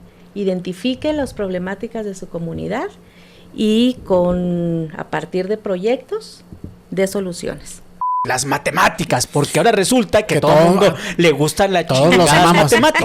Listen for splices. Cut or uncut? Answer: cut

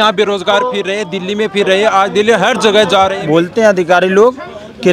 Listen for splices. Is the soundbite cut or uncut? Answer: cut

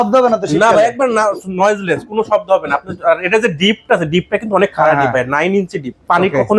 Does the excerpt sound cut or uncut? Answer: uncut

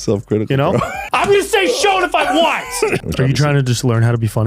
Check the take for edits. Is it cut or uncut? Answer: cut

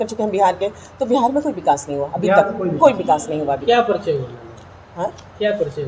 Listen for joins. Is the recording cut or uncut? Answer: uncut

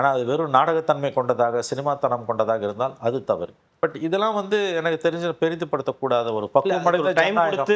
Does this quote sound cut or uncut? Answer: cut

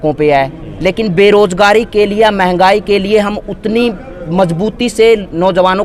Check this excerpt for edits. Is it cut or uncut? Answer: uncut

